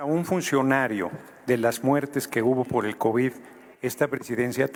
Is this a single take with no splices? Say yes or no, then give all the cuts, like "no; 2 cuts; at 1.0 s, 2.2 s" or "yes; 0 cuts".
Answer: yes; 0 cuts